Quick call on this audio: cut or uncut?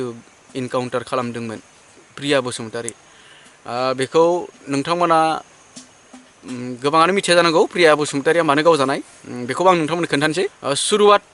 cut